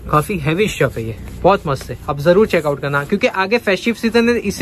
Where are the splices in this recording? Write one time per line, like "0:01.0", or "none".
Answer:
none